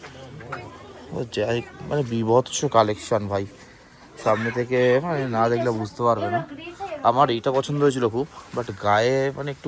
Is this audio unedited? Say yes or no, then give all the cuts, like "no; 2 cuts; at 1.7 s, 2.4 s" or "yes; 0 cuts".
yes; 0 cuts